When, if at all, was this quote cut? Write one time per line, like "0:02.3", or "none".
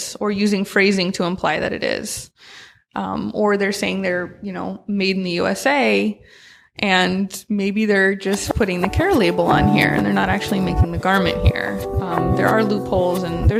none